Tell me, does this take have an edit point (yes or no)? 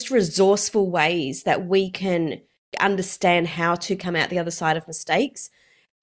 no